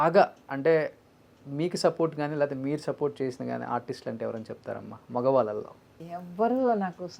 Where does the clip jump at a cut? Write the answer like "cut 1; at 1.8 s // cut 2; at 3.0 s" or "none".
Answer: cut 1; at 6.0 s